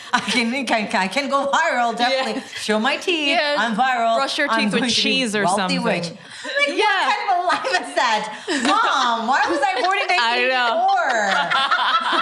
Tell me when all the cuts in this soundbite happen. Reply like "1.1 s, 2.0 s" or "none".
none